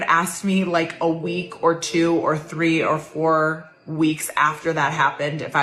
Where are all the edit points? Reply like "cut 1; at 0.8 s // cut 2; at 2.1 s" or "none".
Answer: none